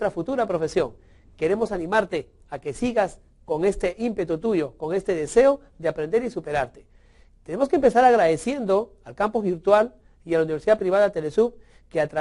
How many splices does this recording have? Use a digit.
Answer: 1